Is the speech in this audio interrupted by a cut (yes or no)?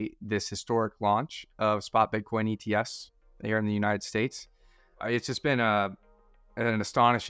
yes